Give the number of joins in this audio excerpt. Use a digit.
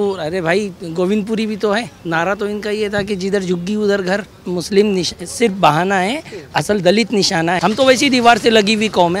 3